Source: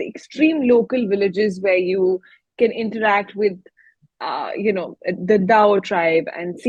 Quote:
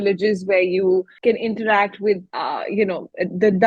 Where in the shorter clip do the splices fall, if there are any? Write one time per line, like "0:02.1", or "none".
0:01.1
0:02.3